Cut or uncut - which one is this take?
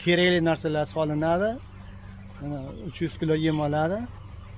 uncut